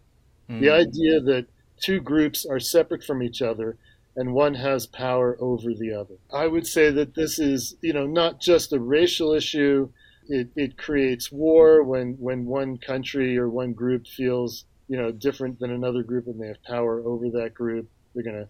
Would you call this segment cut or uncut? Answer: cut